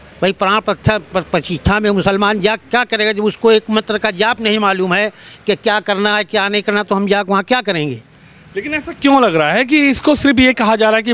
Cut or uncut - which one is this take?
uncut